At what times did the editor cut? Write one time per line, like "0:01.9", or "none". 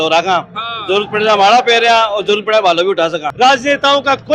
0:03.2